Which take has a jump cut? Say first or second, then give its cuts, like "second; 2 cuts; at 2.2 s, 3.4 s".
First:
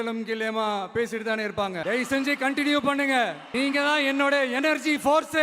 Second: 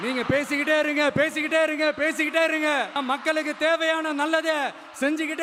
first; 1 cut; at 1.8 s